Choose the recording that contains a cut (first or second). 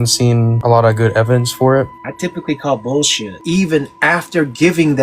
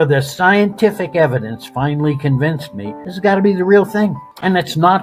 first